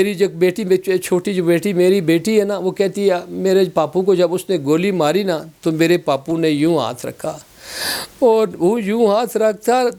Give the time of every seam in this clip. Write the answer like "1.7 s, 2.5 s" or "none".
none